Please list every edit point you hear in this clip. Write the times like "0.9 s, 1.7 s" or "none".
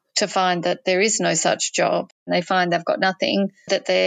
2.3 s